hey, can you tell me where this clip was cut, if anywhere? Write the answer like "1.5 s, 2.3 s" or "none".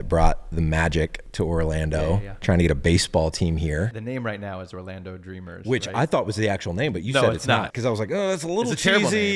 4.0 s, 7.7 s